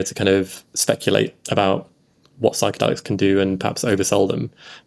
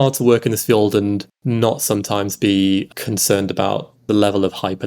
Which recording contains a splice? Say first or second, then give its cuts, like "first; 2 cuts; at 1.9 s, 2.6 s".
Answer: second; 3 cuts; at 1.3 s, 2.9 s, 4.0 s